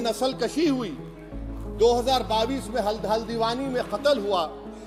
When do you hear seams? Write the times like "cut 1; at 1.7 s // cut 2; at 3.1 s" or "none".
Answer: none